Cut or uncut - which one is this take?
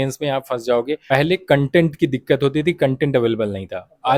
cut